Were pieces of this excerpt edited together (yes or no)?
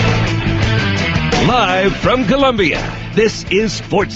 no